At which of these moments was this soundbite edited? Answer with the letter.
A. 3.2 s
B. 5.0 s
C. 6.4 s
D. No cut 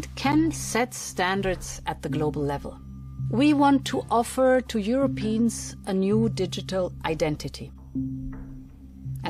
A